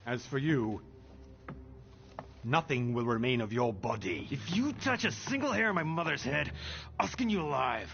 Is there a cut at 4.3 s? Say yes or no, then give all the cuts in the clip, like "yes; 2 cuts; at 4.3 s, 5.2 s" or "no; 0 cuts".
yes; 1 cut; at 4.3 s